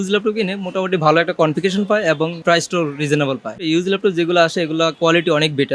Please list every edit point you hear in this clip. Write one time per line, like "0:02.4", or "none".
0:02.4
0:03.7
0:05.0